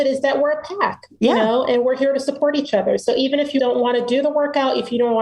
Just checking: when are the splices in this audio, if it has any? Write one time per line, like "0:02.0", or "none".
0:03.6